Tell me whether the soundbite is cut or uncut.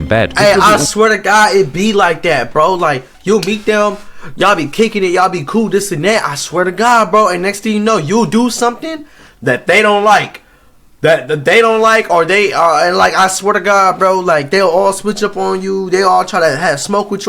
uncut